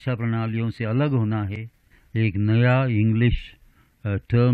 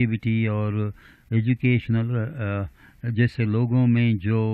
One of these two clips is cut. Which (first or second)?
first